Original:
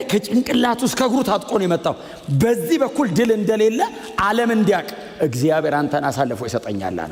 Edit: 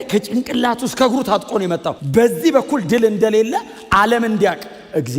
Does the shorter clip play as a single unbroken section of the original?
no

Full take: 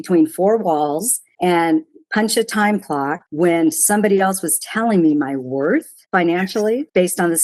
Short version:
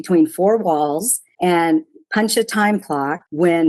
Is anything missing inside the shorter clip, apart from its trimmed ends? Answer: no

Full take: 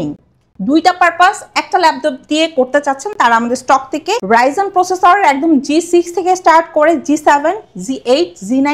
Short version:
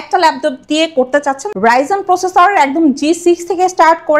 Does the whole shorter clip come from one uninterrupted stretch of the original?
no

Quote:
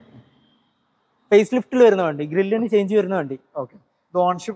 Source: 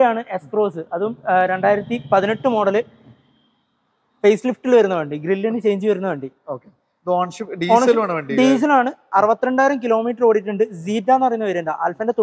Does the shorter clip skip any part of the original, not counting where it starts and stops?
no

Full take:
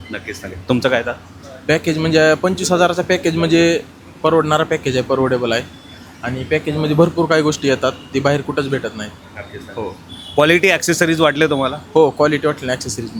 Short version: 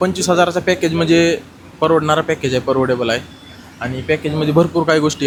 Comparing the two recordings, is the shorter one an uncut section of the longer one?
yes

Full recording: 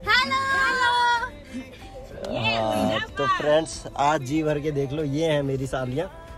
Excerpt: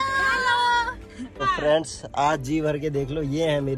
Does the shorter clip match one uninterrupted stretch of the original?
no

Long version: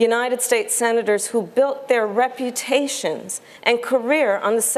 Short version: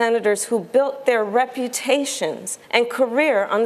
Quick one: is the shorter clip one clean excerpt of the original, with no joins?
no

